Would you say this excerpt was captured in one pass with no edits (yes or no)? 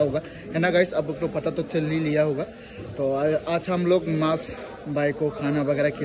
yes